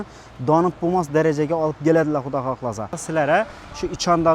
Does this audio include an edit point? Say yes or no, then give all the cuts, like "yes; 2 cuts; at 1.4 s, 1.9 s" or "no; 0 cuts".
yes; 1 cut; at 3.0 s